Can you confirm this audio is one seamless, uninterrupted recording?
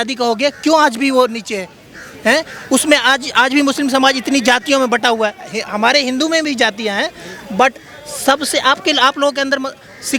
yes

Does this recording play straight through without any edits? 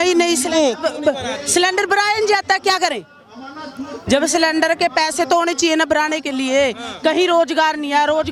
yes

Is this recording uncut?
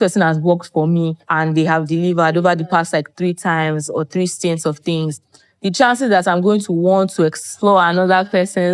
no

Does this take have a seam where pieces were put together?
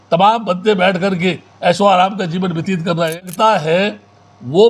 yes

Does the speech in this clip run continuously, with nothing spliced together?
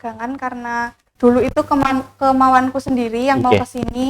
no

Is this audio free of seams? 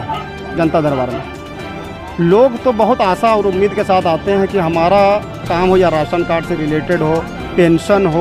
yes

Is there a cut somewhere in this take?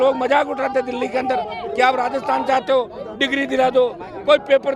no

